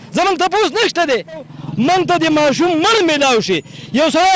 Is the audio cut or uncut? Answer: cut